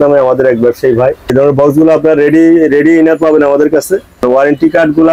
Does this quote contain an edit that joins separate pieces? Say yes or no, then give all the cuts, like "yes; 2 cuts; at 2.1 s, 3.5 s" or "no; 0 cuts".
yes; 2 cuts; at 1.3 s, 4.2 s